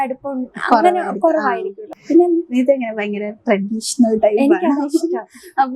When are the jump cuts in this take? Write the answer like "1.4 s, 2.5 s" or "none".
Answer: 1.9 s